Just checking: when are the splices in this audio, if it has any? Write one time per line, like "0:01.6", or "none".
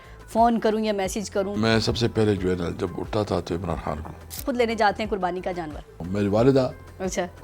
0:01.6
0:04.4
0:06.0